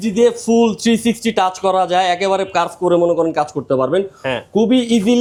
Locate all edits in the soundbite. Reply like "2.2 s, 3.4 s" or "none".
none